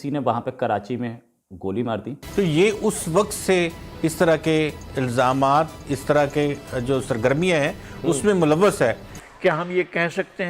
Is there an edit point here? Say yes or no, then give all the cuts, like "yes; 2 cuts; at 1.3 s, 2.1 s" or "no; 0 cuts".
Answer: yes; 2 cuts; at 2.2 s, 8.9 s